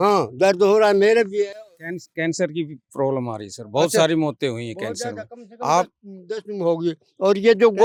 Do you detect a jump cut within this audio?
no; 0 cuts

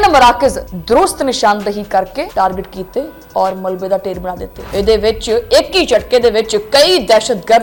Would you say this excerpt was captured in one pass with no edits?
yes; 0 cuts

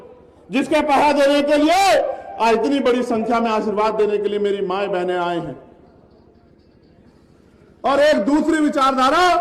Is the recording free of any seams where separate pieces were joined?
no; 1 cut; at 6.4 s

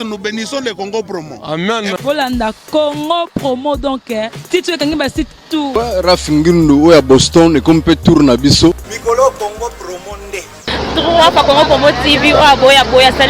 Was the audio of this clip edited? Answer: yes; 2 cuts; at 5.7 s, 8.9 s

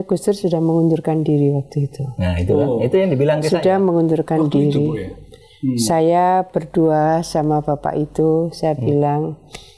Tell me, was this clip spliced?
no; 0 cuts

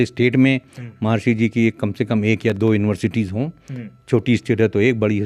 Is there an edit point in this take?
no; 0 cuts

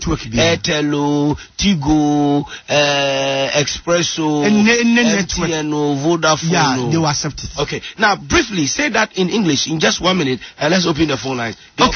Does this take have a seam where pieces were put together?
yes; 1 cut; at 2.6 s

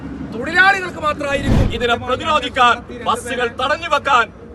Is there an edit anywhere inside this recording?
yes; 1 cut; at 1.6 s

